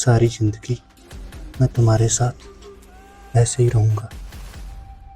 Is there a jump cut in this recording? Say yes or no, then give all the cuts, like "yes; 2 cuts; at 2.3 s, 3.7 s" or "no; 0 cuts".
yes; 1 cut; at 4.1 s